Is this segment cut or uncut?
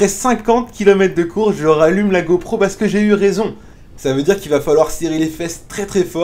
cut